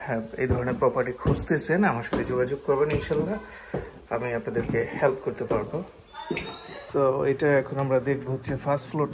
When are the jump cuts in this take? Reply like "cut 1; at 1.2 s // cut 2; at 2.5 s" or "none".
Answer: none